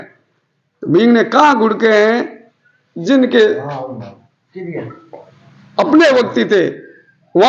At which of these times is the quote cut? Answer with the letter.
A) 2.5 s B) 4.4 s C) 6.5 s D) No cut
D